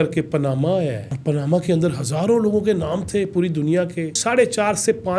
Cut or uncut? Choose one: cut